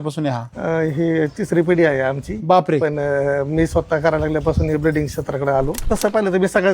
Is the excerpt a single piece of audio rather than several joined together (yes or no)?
no